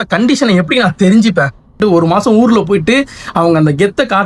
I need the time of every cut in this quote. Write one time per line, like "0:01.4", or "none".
0:01.7